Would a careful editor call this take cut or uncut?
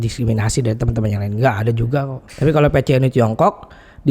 cut